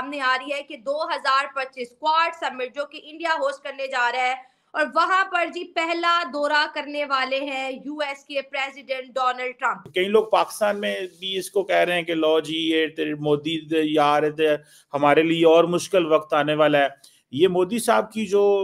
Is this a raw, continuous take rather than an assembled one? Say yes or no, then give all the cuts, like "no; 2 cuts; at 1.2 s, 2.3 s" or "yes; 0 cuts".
no; 1 cut; at 9.8 s